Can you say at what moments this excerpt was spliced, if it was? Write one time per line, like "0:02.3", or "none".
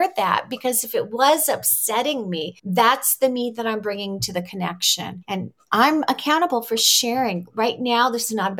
0:02.5
0:05.2